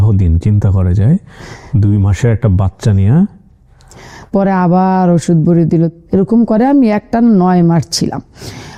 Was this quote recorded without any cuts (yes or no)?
yes